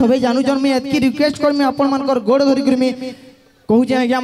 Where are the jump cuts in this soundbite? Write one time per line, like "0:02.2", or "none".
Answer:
none